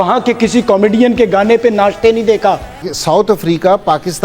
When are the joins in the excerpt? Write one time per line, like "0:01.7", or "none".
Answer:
0:02.9